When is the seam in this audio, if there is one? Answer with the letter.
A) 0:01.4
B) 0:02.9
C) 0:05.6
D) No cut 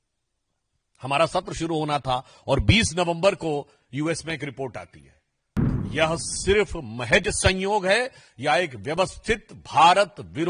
C